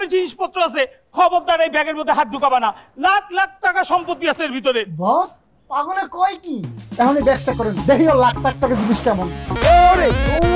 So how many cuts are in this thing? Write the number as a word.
one